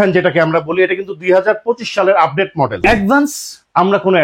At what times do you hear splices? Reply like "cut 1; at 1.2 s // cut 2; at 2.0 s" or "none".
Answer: cut 1; at 2.8 s

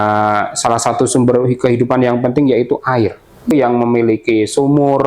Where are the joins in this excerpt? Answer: cut 1; at 3.5 s

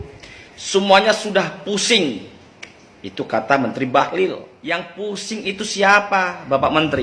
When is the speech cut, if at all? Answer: none

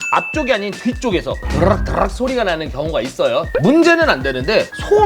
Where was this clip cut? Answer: cut 1; at 3.5 s

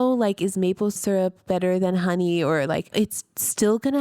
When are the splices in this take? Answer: cut 1; at 2.9 s

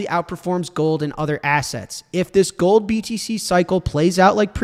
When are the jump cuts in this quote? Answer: none

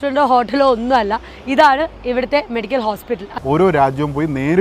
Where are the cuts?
cut 1; at 3.3 s

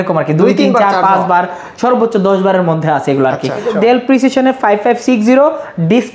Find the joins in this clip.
cut 1; at 3.7 s

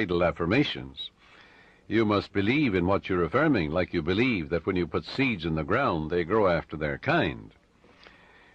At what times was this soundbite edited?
none

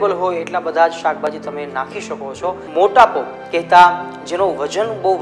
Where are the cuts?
cut 1; at 2.6 s

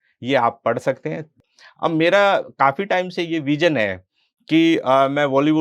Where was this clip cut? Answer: cut 1; at 1.3 s

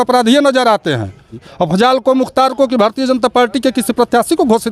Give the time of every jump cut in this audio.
cut 1; at 1.3 s

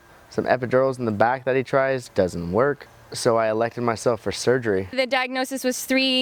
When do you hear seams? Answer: cut 1; at 4.9 s

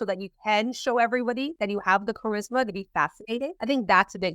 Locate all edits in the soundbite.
cut 1; at 1.5 s // cut 2; at 3.6 s

